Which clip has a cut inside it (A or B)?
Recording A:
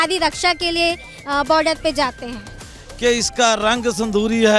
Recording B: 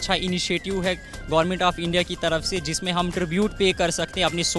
A